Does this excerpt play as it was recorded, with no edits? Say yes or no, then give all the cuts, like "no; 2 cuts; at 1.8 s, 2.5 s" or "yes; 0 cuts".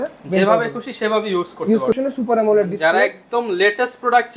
no; 1 cut; at 2.0 s